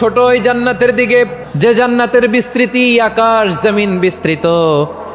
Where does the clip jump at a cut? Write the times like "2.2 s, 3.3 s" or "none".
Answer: 1.4 s